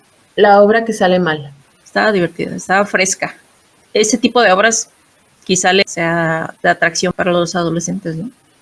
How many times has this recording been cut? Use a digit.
2